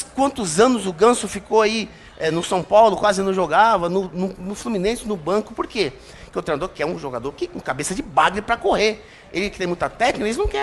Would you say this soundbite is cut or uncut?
uncut